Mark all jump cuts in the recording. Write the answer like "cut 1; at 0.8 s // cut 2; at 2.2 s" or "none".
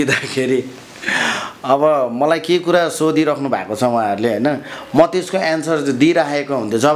none